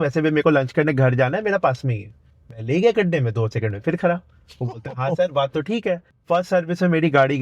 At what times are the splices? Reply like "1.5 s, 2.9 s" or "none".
6.1 s